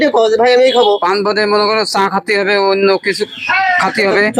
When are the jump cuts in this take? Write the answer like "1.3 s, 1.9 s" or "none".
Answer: none